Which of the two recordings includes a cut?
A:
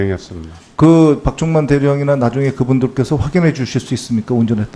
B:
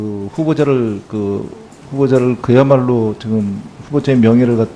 A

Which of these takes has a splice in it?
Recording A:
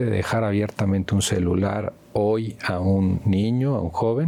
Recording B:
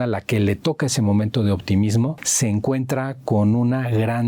B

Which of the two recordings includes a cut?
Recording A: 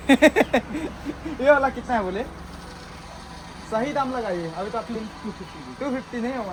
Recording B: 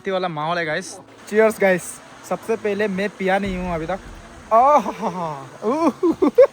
B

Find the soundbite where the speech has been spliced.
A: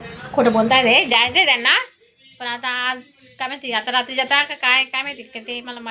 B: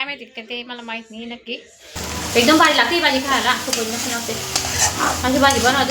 B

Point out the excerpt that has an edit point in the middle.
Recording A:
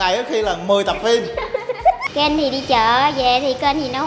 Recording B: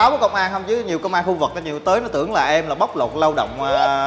A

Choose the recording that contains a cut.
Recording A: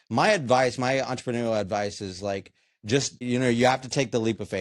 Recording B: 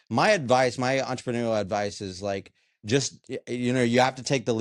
A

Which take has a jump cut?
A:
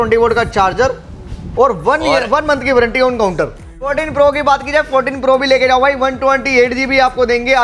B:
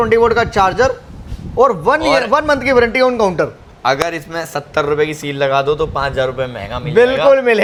A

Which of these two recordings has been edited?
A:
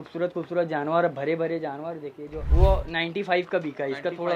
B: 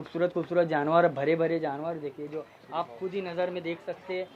A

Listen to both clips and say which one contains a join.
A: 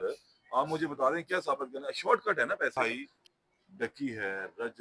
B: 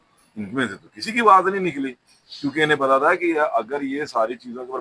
A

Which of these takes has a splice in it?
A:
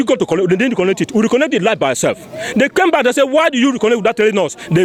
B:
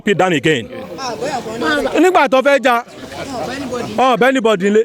B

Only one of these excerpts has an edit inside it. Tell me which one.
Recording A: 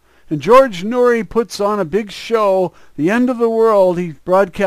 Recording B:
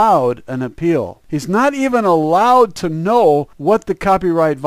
B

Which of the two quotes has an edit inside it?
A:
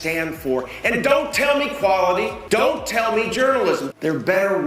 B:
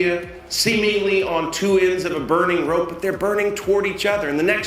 A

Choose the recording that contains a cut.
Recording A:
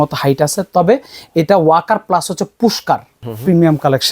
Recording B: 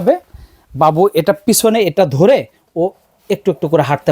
A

